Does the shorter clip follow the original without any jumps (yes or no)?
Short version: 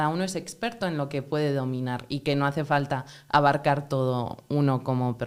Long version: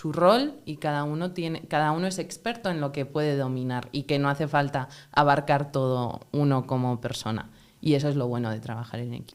yes